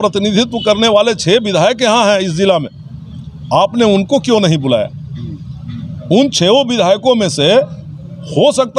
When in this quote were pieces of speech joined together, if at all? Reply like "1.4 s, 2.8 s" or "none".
none